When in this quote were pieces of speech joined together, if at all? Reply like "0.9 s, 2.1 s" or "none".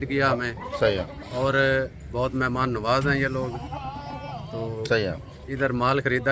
none